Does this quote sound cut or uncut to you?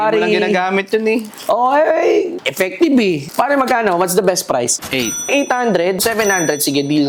uncut